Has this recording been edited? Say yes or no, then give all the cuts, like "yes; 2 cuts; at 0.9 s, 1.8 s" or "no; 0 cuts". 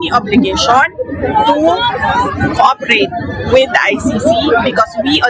no; 0 cuts